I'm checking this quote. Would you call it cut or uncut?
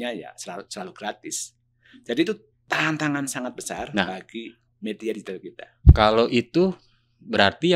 uncut